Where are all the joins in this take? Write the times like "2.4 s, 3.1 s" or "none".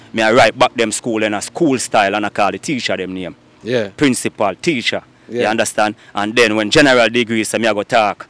none